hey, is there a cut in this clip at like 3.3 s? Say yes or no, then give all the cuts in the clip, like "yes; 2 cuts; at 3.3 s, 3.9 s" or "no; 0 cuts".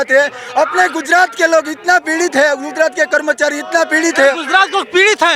no; 0 cuts